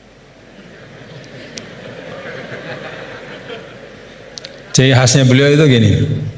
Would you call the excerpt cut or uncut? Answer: uncut